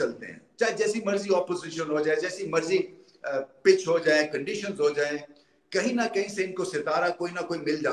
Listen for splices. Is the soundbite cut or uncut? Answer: uncut